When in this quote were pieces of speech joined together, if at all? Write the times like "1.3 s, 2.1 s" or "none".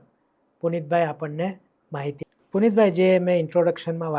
2.2 s

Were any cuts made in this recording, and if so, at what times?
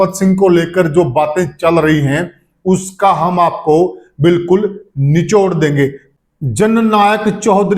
6.1 s

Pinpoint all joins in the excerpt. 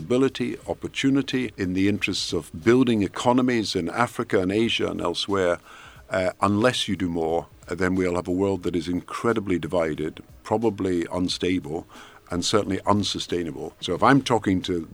1.5 s, 13.8 s

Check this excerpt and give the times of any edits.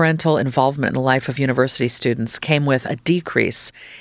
none

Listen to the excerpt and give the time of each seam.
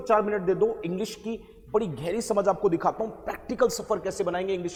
none

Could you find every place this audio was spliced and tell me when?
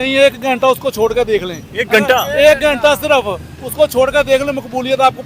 none

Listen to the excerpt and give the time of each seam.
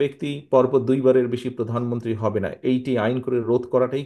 none

